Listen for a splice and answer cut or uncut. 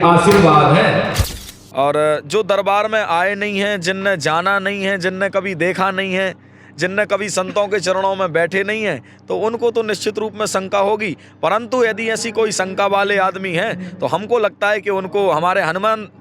cut